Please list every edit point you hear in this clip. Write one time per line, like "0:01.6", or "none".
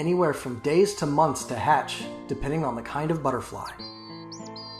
0:03.7